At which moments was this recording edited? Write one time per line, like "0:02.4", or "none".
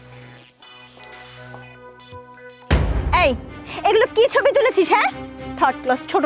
0:02.9